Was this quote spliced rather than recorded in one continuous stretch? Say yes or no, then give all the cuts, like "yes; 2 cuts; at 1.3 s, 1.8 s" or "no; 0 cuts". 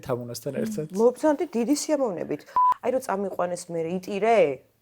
yes; 1 cut; at 2.5 s